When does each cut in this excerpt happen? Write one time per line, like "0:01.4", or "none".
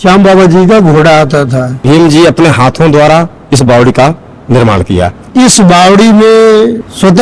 0:01.7
0:05.3